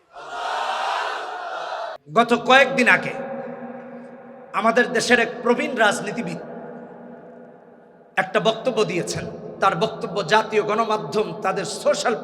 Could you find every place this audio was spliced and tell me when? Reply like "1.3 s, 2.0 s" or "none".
2.0 s